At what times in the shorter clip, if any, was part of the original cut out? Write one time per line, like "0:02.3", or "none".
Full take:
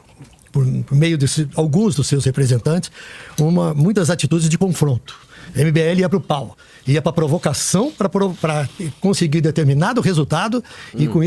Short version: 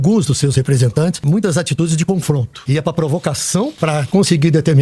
0:01.2
0:02.5
0:03.8